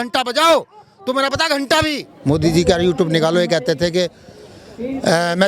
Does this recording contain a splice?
yes; 1 cut; at 2.1 s

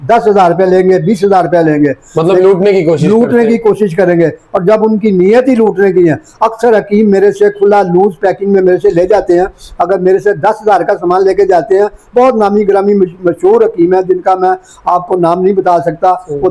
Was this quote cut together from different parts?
no; 0 cuts

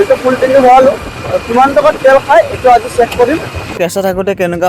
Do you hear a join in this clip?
yes; 1 cut; at 3.7 s

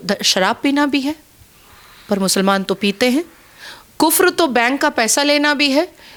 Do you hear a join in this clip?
no; 0 cuts

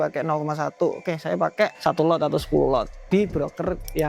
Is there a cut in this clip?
yes; 2 cuts; at 1.8 s, 3.0 s

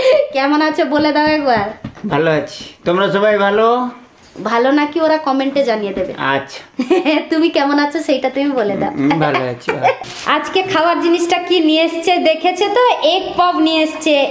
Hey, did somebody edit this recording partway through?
yes; 1 cut; at 10.1 s

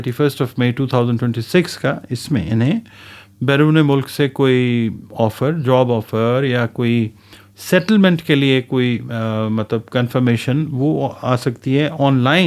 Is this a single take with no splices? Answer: yes; 0 cuts

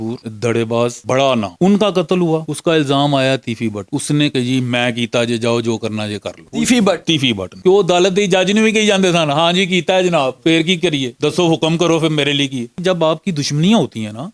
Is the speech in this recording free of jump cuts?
no; 3 cuts; at 4.2 s, 7.6 s, 12.7 s

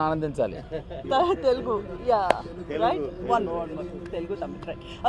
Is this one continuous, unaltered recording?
no; 1 cut; at 0.9 s

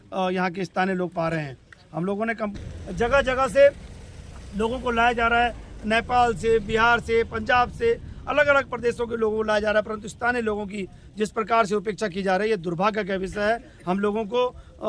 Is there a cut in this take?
yes; 1 cut; at 2.6 s

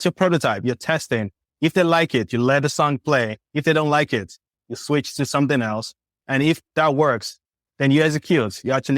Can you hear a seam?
yes; 2 cuts; at 6.7 s, 7.6 s

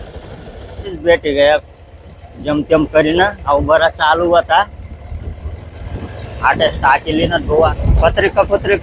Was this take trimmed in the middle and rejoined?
yes; 2 cuts; at 1.0 s, 7.8 s

